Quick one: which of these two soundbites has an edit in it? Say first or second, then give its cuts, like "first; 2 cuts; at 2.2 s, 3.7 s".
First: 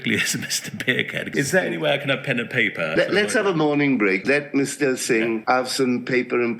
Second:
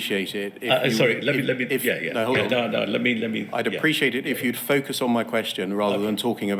first; 4 cuts; at 1.3 s, 2.9 s, 4.2 s, 5.4 s